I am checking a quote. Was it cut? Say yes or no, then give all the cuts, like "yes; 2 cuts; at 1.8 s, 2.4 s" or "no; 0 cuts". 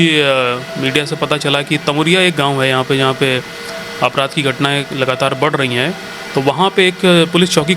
no; 0 cuts